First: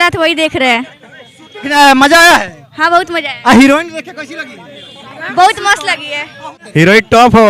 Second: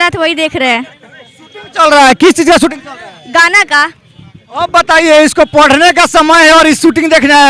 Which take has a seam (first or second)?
first